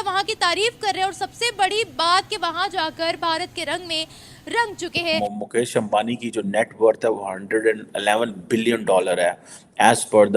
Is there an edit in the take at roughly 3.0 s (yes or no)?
no